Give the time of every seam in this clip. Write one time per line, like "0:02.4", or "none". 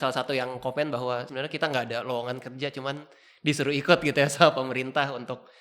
0:01.3